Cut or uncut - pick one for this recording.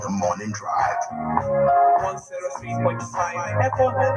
uncut